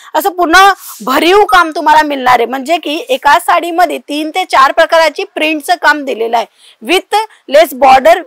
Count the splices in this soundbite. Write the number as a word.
zero